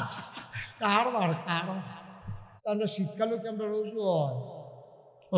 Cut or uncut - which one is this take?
cut